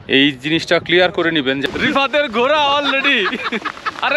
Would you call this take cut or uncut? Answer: cut